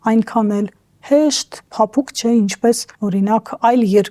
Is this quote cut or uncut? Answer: cut